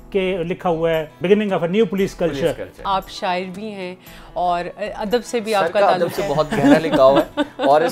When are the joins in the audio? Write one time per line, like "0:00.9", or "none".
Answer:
0:01.2
0:02.8